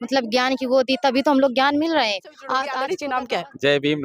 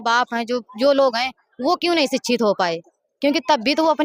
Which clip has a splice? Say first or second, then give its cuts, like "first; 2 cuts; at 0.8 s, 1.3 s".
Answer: first; 1 cut; at 2.8 s